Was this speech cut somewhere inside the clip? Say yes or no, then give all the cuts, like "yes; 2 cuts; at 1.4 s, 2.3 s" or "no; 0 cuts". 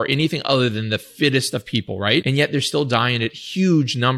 yes; 1 cut; at 2.2 s